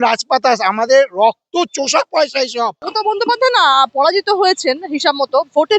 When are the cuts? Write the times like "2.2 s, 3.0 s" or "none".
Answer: 2.8 s